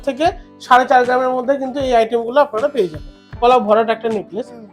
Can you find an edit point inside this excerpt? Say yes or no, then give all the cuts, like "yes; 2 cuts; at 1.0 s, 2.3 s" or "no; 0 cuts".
yes; 1 cut; at 3.4 s